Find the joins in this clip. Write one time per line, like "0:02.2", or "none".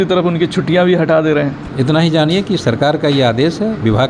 0:01.6

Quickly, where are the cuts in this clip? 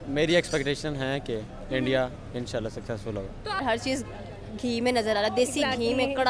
0:03.6

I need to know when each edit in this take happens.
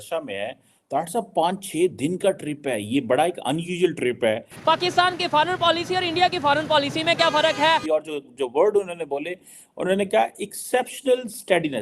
0:04.5
0:07.8

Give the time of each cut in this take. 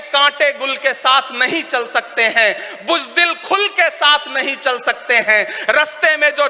none

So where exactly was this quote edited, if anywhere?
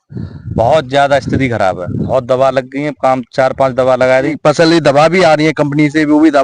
0:02.0
0:04.4

